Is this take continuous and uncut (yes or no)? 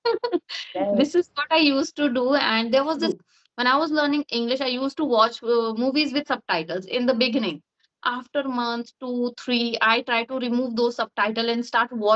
no